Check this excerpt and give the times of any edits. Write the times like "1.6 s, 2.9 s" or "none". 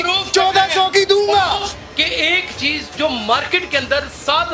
1.7 s